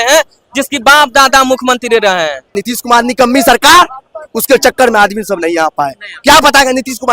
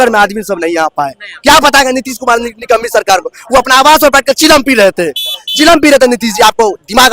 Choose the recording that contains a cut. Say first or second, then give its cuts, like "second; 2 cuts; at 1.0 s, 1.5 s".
first; 1 cut; at 2.6 s